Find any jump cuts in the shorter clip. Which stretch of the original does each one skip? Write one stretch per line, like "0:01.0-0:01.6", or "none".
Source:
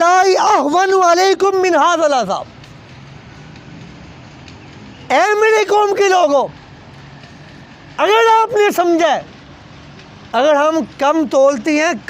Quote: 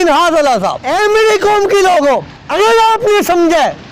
0:02.5-0:05.1
0:06.6-0:07.9

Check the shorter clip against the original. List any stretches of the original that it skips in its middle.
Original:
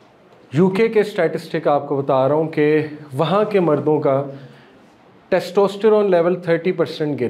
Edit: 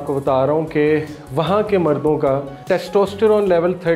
0:04.3-0:05.1

